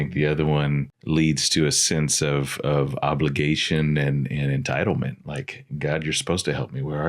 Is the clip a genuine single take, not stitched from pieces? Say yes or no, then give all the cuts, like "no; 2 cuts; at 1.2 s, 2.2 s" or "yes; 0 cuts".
no; 1 cut; at 0.9 s